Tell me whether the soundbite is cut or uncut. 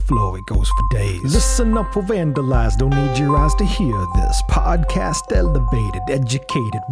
uncut